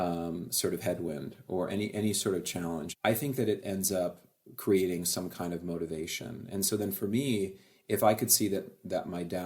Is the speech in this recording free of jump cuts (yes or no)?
no